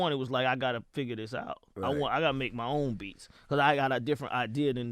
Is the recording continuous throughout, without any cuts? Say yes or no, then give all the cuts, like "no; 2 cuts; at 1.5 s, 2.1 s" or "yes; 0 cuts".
yes; 0 cuts